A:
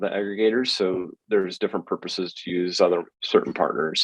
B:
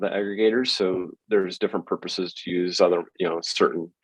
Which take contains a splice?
A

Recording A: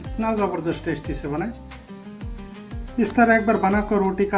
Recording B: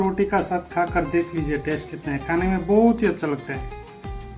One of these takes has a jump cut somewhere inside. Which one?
A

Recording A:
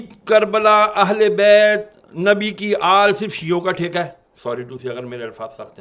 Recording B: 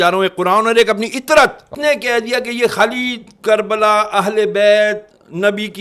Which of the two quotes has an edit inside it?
B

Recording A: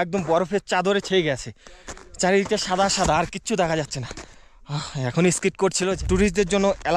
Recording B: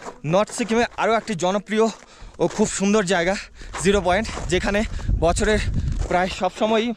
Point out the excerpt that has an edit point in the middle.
A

